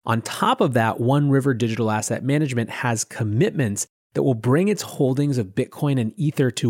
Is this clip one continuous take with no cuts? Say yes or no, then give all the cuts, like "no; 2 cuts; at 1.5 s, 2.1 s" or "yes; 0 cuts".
yes; 0 cuts